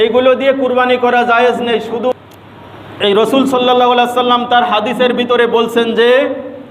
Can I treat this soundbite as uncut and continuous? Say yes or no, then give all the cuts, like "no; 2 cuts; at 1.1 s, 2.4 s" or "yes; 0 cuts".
no; 1 cut; at 2.1 s